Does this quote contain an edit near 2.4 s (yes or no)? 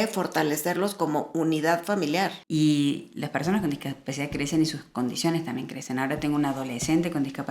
yes